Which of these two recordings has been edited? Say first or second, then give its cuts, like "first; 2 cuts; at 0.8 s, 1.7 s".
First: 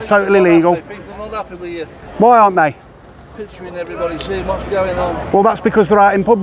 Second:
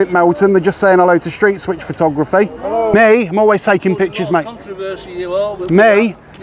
second; 1 cut; at 2.9 s